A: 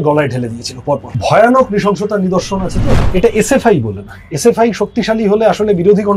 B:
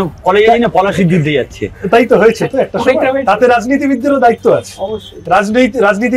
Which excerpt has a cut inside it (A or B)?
A